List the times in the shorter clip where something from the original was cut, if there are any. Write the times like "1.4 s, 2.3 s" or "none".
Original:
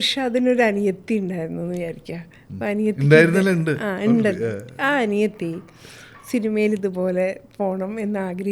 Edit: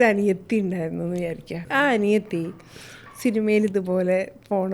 1.6 s